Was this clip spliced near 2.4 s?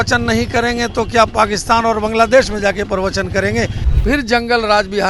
no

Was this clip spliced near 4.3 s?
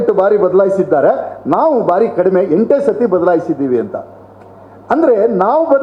no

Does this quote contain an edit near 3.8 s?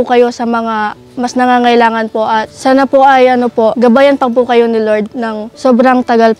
yes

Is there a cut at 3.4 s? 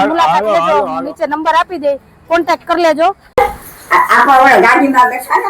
yes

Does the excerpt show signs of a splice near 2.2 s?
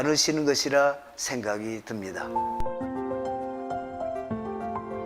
yes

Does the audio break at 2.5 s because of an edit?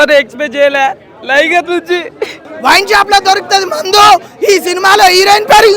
yes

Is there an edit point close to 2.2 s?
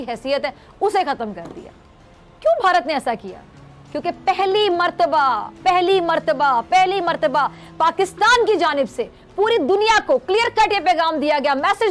no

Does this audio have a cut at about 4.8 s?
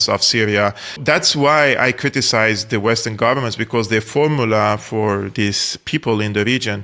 no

